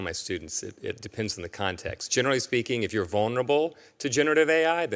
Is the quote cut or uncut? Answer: uncut